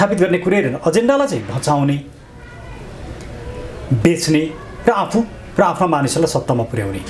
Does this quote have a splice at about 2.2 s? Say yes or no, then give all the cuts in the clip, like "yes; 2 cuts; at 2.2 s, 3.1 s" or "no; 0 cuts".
no; 0 cuts